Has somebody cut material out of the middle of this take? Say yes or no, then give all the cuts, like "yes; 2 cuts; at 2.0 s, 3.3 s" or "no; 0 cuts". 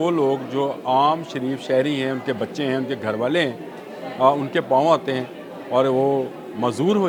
no; 0 cuts